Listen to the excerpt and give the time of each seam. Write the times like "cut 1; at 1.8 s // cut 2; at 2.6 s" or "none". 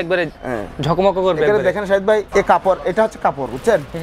cut 1; at 2.3 s